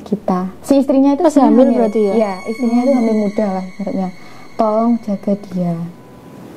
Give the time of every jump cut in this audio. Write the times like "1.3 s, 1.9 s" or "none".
none